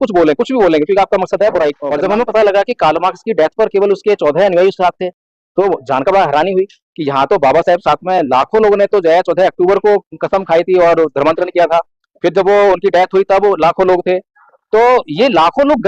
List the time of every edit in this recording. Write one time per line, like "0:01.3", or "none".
0:01.9